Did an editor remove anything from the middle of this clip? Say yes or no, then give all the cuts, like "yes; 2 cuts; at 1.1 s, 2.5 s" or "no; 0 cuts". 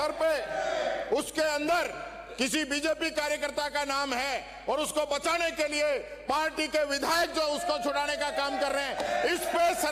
no; 0 cuts